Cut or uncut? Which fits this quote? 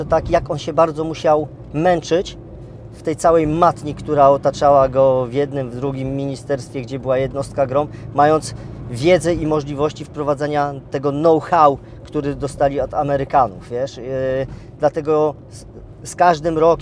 uncut